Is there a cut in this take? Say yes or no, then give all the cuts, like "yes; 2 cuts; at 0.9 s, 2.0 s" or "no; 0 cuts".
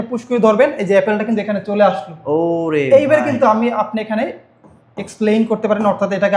no; 0 cuts